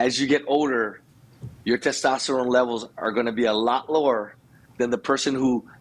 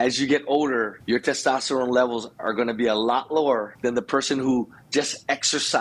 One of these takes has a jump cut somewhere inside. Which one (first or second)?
second